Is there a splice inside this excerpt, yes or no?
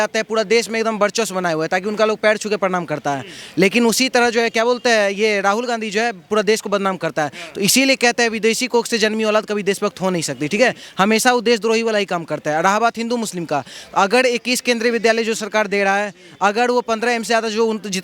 no